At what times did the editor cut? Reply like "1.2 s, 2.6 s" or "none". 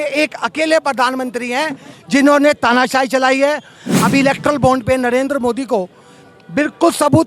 3.8 s